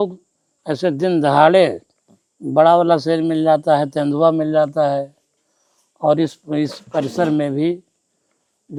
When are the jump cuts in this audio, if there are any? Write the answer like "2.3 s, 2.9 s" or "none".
none